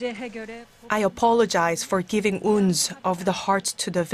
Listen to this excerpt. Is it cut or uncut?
uncut